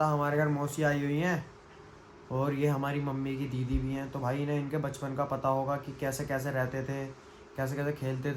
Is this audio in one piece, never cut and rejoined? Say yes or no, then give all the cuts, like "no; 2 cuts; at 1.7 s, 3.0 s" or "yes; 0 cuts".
yes; 0 cuts